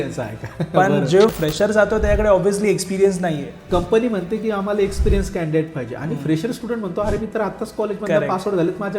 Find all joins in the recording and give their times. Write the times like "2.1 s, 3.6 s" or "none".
1.3 s, 3.5 s